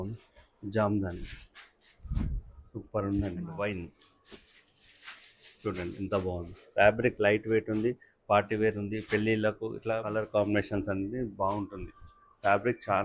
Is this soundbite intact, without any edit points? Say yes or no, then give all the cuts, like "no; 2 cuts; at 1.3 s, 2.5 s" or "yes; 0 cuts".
no; 2 cuts; at 3.5 s, 10.1 s